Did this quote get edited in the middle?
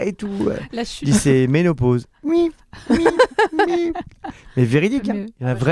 no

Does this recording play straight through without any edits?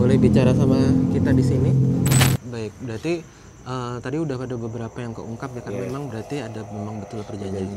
no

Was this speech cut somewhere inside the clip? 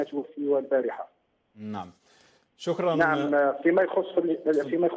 no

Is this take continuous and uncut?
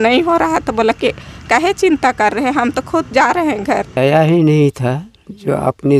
no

